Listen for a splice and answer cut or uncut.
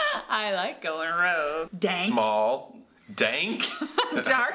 cut